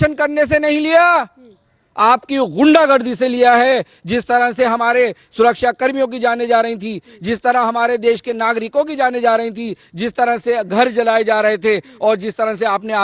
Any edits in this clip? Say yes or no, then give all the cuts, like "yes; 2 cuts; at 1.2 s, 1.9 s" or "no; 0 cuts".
no; 0 cuts